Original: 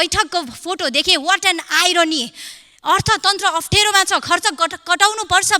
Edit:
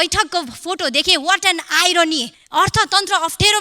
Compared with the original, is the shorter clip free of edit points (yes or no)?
no